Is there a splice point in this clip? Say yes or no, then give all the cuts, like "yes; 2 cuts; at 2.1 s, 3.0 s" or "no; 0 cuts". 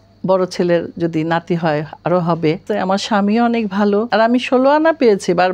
yes; 2 cuts; at 2.7 s, 4.1 s